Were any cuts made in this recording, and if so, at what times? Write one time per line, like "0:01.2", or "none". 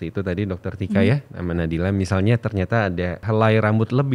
0:03.2